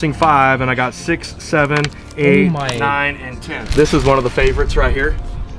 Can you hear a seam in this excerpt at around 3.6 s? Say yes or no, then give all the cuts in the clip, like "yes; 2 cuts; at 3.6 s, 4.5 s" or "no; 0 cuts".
yes; 1 cut; at 3.6 s